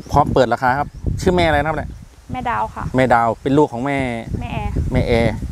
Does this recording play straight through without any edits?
yes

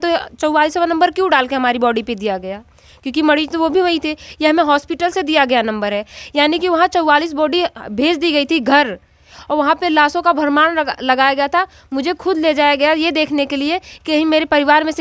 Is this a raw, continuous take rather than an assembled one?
yes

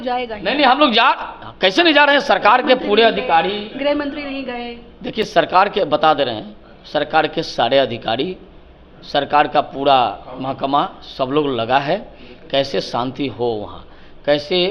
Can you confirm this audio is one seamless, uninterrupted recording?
yes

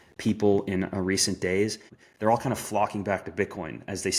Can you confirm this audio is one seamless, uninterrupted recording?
no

